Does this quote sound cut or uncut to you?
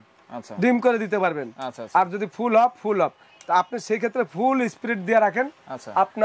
uncut